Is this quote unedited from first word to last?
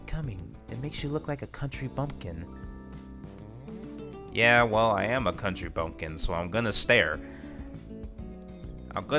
yes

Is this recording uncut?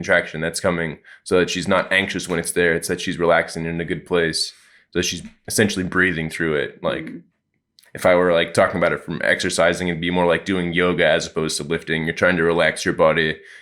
yes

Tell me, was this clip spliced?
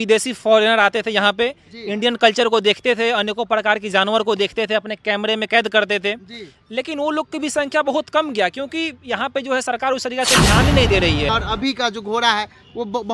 yes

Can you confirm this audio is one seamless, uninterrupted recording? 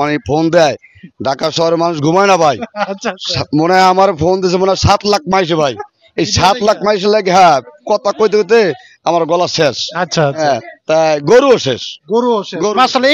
yes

